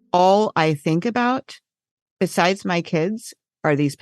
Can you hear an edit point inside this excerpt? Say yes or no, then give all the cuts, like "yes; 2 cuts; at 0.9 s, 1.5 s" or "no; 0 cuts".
no; 0 cuts